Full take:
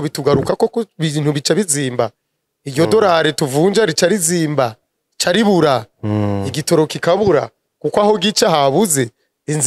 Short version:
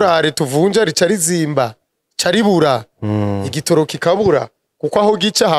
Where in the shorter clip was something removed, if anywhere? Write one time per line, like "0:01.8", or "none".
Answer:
none

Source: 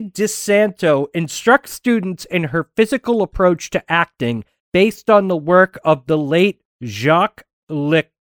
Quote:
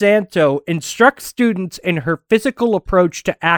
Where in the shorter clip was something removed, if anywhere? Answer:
none

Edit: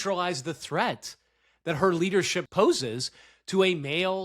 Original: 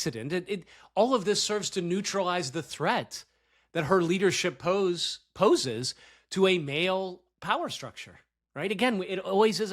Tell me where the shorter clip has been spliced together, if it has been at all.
0:02.4

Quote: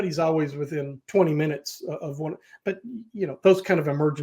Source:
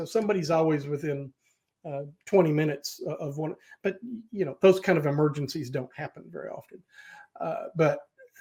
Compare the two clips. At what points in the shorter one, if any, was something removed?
0:01.0

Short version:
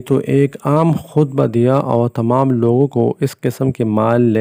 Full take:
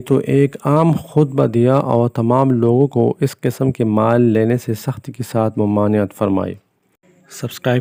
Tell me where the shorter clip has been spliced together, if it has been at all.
none

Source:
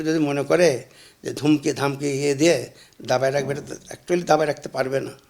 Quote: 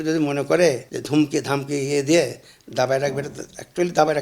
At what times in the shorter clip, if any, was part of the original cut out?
0:00.9

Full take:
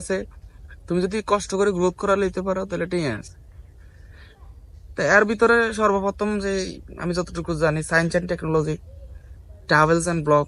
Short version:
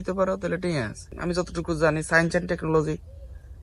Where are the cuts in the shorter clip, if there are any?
0:01.1

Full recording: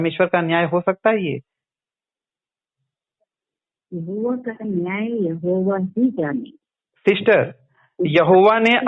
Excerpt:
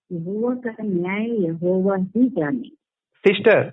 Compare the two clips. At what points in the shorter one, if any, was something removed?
none

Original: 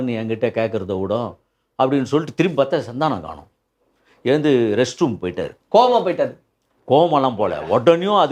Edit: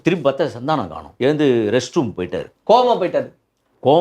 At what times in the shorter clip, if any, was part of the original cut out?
0:01.0

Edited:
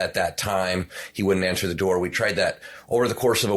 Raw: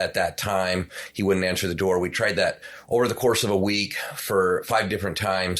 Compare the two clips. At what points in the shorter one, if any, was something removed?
none

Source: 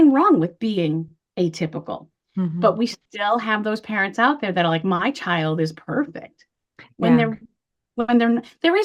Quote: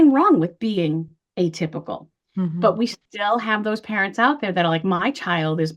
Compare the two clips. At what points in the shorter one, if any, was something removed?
none

